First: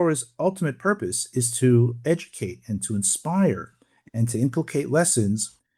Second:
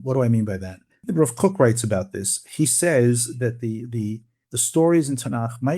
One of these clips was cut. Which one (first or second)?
second